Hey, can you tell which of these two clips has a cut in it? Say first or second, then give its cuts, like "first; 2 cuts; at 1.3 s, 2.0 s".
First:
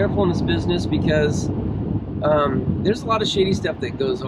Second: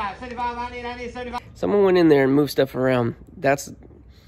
second; 1 cut; at 1.3 s